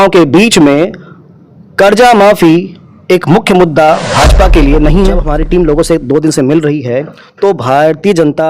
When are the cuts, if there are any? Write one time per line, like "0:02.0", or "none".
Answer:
0:05.2